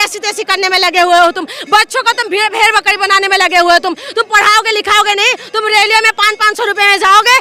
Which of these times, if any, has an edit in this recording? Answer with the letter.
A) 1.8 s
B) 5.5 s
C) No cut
C